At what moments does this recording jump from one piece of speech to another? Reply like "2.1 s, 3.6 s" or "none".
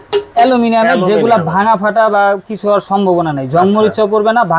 none